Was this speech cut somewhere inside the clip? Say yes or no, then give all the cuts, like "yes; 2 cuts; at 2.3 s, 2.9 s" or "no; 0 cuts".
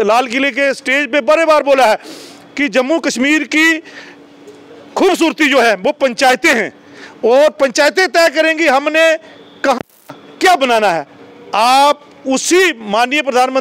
no; 0 cuts